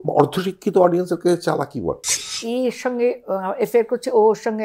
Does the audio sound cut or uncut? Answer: cut